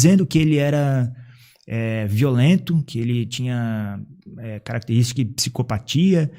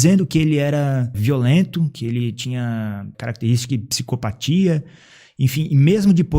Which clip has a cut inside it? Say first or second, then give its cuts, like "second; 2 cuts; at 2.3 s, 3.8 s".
second; 2 cuts; at 1.2 s, 3.1 s